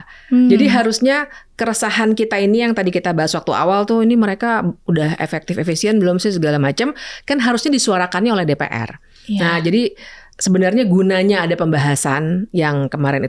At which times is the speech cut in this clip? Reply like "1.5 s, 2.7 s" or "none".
none